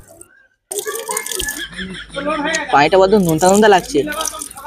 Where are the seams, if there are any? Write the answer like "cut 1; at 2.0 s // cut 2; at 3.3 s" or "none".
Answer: cut 1; at 1.5 s